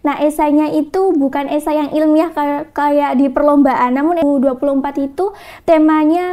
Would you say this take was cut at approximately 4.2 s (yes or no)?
yes